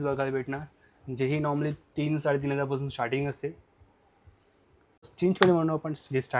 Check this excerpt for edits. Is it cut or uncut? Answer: cut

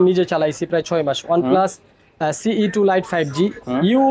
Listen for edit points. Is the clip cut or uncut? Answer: uncut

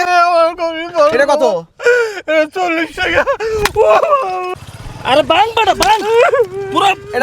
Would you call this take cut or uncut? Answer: cut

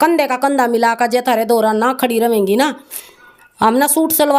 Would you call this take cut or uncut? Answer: uncut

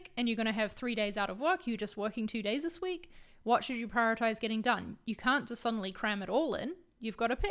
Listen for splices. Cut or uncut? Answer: uncut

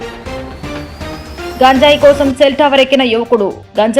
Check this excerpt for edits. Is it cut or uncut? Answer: cut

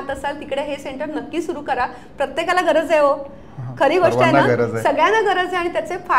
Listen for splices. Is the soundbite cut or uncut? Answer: uncut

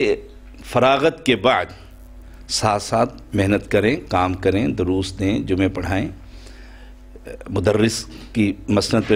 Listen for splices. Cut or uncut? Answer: uncut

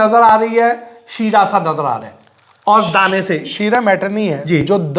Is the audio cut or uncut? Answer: uncut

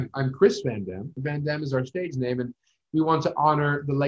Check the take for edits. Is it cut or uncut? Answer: cut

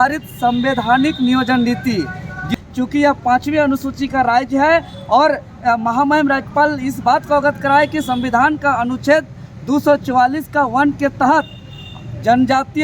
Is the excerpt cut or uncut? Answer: cut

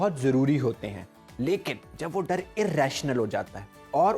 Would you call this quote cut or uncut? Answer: uncut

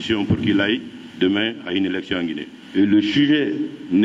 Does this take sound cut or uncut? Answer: cut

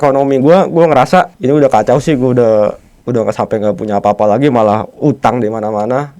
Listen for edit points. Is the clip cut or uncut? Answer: cut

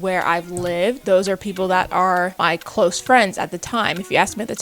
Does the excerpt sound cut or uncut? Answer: cut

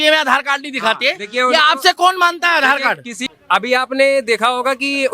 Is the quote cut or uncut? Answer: cut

